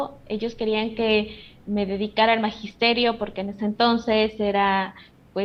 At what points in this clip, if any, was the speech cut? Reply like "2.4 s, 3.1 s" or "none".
none